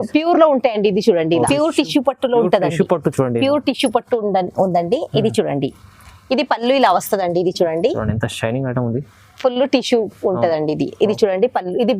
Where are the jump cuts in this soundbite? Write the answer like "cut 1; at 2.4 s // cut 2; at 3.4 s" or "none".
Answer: cut 1; at 1.5 s